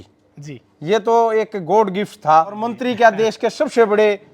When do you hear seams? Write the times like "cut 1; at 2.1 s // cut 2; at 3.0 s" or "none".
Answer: cut 1; at 2.7 s